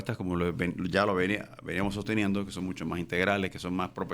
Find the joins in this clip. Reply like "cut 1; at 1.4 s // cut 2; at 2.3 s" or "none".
none